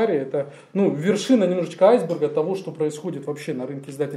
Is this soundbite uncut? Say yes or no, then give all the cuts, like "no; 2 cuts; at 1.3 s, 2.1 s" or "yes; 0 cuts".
yes; 0 cuts